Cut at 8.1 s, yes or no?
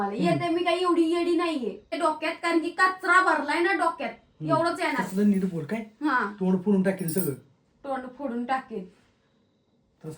no